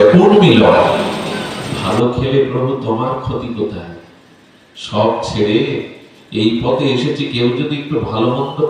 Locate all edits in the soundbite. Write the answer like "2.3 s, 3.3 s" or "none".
1.1 s